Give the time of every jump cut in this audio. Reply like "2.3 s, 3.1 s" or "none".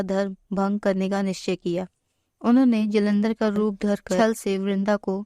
4.2 s